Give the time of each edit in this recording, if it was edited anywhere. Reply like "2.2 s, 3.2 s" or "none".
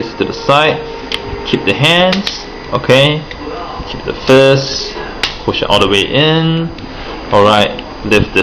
none